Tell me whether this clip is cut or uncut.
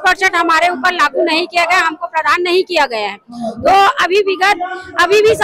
uncut